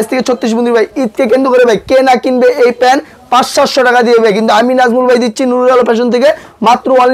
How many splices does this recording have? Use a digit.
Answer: 0